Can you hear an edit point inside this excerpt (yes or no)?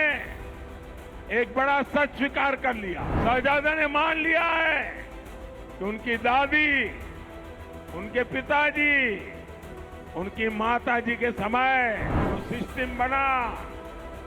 yes